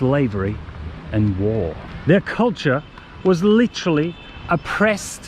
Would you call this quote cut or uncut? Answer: cut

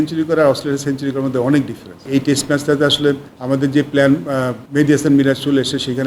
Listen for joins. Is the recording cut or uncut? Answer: cut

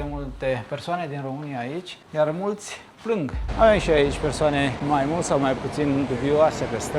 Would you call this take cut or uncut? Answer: cut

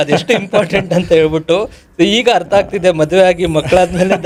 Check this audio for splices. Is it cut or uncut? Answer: uncut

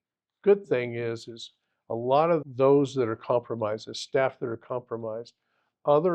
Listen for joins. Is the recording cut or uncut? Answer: cut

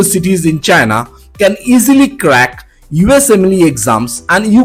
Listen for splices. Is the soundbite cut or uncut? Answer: uncut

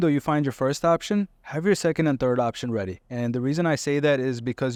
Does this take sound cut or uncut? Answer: uncut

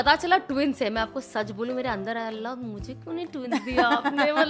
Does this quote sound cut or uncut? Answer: uncut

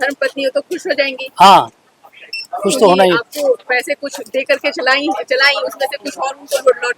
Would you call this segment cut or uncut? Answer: uncut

